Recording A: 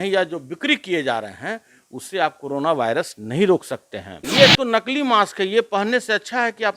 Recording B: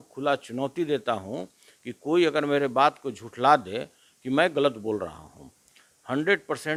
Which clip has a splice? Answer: A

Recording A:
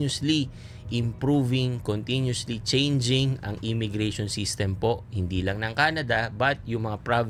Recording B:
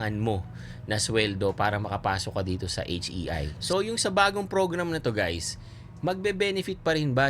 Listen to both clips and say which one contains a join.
B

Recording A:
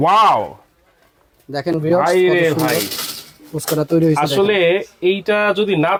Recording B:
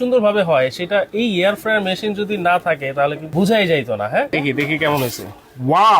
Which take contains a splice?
B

